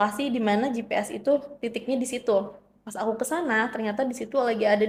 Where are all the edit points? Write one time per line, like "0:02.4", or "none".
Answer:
none